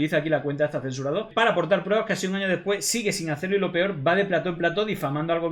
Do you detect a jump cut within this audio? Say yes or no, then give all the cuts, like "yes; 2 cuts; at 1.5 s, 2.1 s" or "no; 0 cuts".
no; 0 cuts